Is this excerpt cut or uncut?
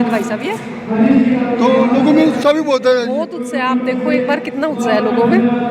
uncut